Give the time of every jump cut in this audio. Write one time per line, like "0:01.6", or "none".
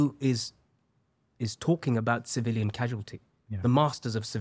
none